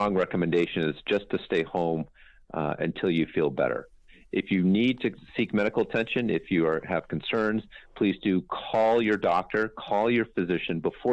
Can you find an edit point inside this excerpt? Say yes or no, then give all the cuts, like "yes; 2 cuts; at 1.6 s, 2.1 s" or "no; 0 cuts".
no; 0 cuts